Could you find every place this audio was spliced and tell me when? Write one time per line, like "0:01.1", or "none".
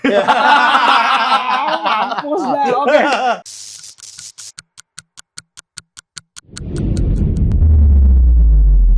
0:03.4

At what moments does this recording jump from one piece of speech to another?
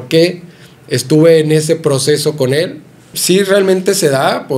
0:03.1

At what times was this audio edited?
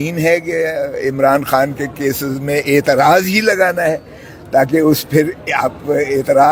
none

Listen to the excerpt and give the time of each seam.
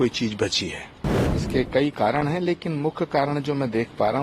0:01.3

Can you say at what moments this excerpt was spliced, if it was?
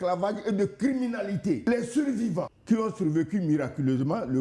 0:01.6
0:02.5

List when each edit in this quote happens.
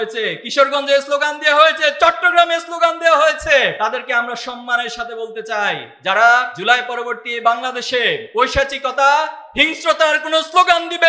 0:03.8
0:05.9
0:06.5
0:08.2

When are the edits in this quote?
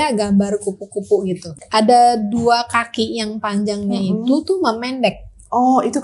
0:01.5

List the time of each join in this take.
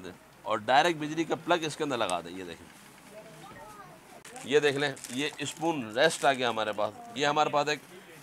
0:04.3
0:07.0

